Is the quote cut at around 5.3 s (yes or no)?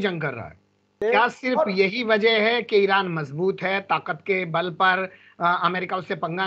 no